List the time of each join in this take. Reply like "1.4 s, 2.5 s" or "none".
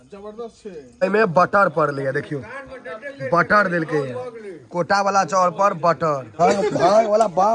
1.0 s, 6.3 s